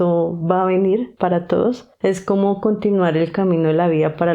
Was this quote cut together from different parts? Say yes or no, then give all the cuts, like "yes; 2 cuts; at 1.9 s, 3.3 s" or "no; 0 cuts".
yes; 1 cut; at 1.9 s